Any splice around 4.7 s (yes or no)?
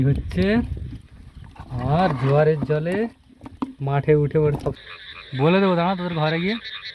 yes